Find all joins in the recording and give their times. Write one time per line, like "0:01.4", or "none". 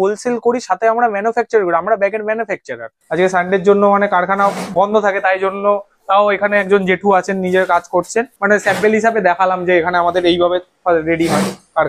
0:02.9
0:08.3